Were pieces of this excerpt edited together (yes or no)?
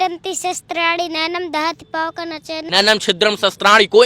yes